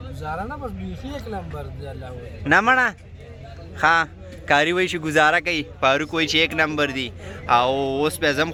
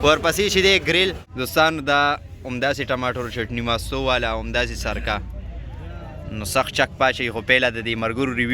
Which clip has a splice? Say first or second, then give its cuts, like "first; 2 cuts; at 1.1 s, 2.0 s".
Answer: second; 1 cut; at 1.2 s